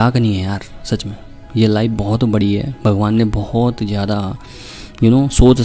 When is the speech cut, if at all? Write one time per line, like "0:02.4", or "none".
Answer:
none